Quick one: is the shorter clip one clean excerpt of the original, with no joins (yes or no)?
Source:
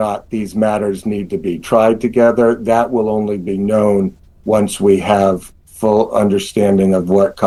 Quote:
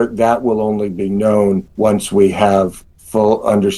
no